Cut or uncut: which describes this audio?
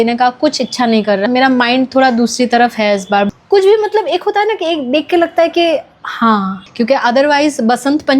cut